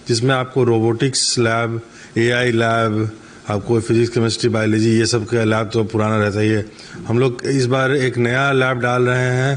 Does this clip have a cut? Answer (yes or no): no